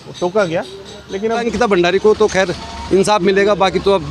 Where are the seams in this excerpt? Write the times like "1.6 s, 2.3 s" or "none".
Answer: 1.5 s